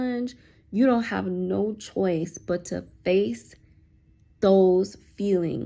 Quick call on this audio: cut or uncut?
uncut